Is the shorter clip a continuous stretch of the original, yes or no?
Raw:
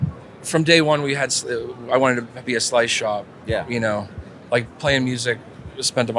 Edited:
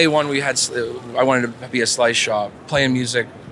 no